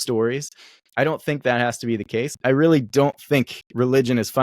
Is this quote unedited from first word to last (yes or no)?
no